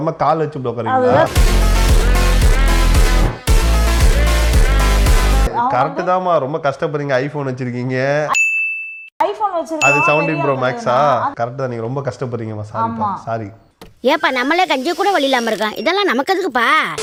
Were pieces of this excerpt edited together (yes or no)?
no